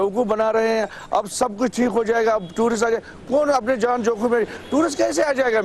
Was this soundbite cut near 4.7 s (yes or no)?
no